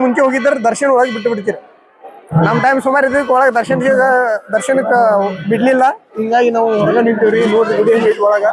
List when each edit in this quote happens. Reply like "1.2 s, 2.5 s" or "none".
none